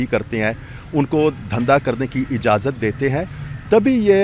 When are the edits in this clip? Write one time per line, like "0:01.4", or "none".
none